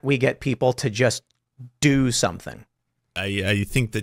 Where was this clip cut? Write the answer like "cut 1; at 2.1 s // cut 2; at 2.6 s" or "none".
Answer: cut 1; at 3.1 s